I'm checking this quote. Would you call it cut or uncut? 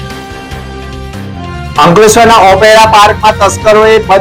cut